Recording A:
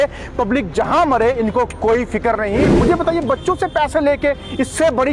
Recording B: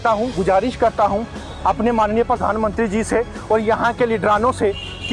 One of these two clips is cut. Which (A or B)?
A